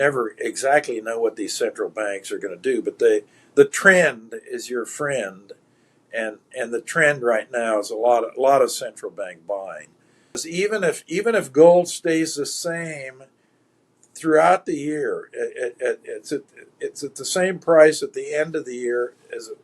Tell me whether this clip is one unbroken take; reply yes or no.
no